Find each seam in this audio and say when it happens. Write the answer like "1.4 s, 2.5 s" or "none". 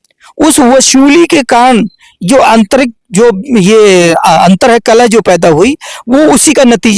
none